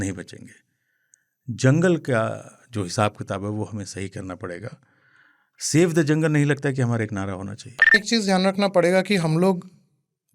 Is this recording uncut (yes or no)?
no